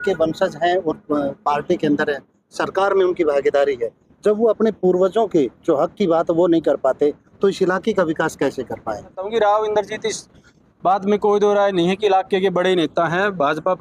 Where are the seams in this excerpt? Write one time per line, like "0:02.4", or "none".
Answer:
0:09.2